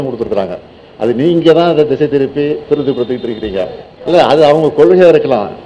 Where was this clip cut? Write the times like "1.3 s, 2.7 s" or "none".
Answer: 3.9 s